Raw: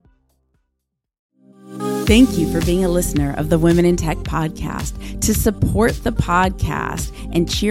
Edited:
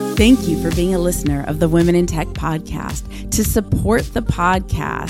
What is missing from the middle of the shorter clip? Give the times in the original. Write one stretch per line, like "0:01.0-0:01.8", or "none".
none